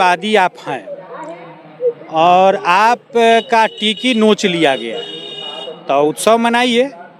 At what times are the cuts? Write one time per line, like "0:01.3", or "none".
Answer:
none